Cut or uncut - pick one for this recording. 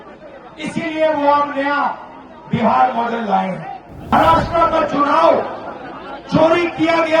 cut